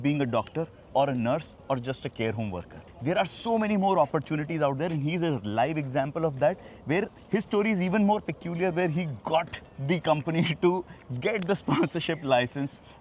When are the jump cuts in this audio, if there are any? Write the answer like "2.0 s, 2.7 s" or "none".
none